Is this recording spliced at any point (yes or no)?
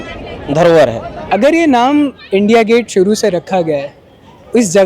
yes